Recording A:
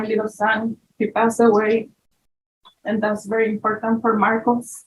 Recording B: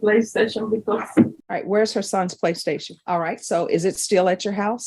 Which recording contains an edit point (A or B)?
B